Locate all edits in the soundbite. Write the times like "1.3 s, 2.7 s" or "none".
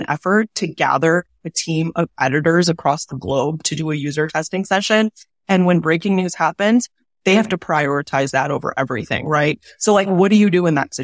none